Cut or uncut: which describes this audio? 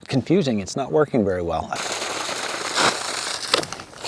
cut